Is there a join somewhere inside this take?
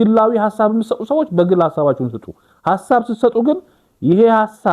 no; 0 cuts

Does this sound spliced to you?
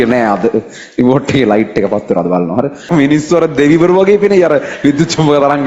yes; 1 cut; at 2.9 s

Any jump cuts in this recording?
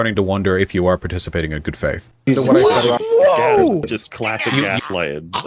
no; 0 cuts

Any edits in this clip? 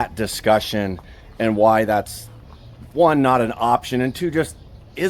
no; 0 cuts

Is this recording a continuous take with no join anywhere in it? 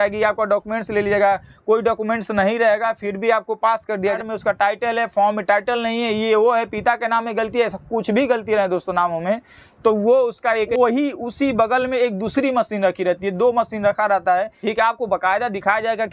no; 3 cuts; at 4.2 s, 10.7 s, 14.5 s

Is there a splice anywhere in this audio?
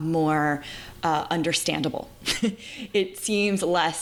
no; 0 cuts

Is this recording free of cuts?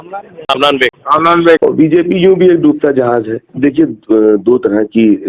no; 2 cuts; at 1.6 s, 3.5 s

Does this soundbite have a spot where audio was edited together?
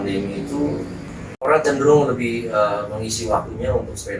yes; 1 cut; at 1.3 s

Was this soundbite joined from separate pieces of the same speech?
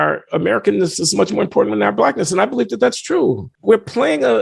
yes; 1 cut; at 3.5 s

